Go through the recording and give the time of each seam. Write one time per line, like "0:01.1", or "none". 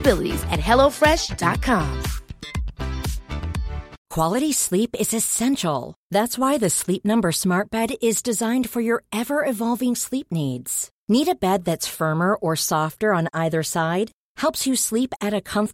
0:03.9